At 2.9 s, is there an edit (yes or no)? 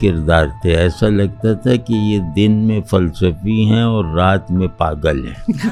no